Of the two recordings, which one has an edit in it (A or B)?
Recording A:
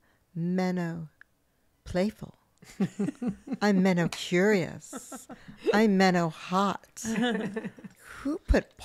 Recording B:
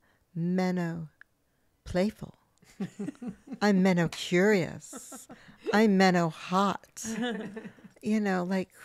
A